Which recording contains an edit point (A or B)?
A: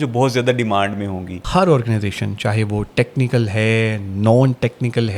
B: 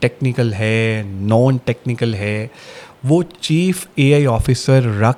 A